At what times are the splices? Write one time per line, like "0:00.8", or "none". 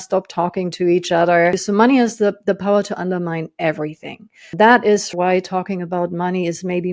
0:01.6
0:04.5
0:05.1